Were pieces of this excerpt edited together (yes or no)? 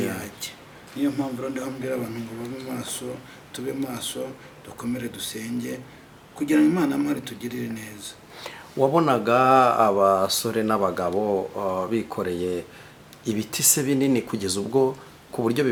no